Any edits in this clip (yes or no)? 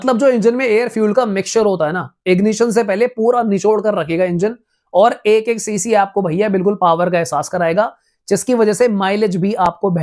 no